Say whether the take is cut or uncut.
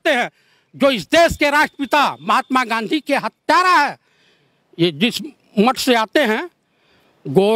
uncut